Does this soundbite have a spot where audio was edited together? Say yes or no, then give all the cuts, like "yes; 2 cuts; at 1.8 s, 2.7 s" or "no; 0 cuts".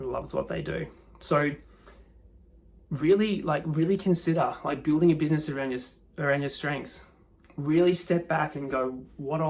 no; 0 cuts